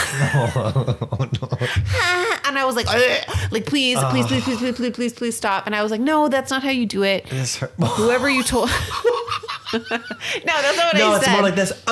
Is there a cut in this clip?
no; 0 cuts

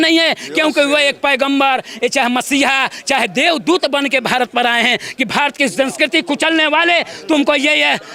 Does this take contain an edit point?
no; 0 cuts

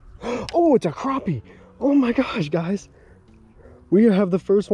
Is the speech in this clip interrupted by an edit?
no; 0 cuts

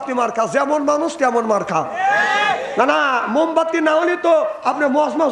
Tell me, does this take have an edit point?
no; 0 cuts

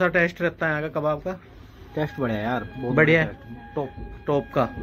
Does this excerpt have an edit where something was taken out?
no; 0 cuts

